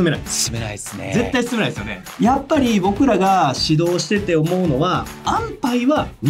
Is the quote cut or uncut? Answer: cut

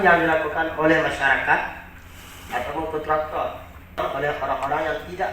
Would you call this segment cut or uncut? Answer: cut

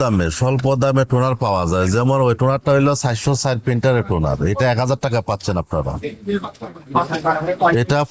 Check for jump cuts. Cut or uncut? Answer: uncut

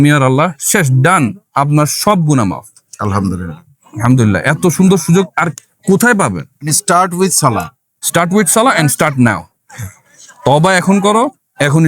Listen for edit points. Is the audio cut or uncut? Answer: cut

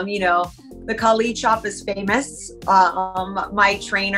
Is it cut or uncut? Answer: uncut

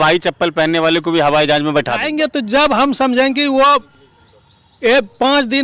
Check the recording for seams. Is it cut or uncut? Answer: cut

